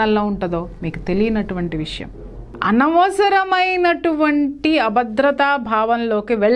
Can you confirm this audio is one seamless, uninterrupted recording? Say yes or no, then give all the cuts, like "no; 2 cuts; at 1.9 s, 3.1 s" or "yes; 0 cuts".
no; 1 cut; at 2.4 s